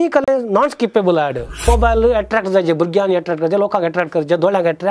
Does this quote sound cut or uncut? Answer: cut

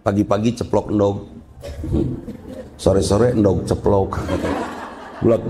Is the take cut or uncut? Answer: uncut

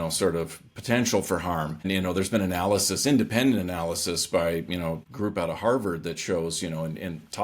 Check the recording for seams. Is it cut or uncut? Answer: cut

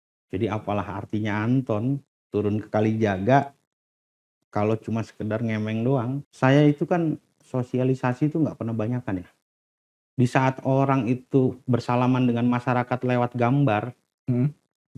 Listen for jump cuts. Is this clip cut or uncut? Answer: cut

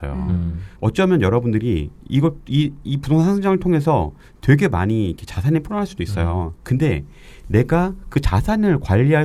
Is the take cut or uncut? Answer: uncut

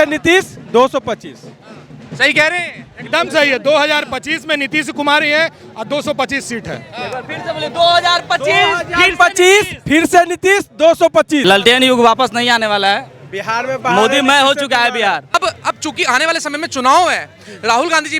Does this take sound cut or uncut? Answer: cut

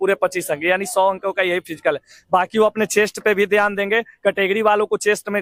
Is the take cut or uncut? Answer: uncut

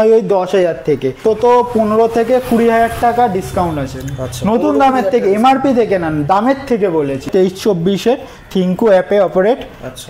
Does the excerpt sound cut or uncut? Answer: cut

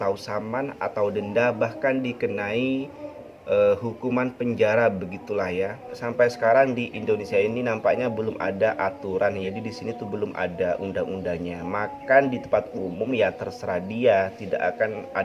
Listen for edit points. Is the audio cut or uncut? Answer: cut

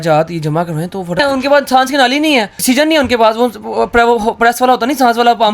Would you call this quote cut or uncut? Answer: cut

